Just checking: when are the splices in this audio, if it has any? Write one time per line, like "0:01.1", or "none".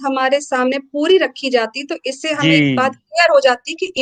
none